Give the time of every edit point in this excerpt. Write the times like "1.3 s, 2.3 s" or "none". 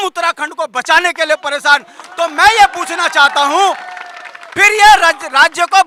none